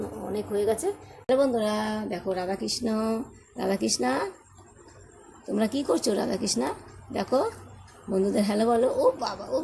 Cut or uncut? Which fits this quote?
cut